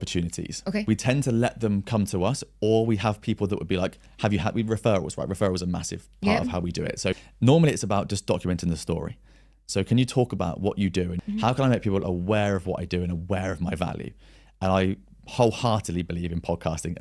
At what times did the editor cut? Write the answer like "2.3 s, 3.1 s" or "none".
11.1 s